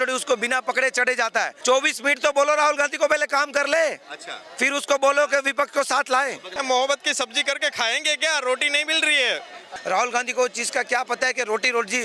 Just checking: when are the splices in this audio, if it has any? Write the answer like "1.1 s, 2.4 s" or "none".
1.5 s, 6.4 s, 9.7 s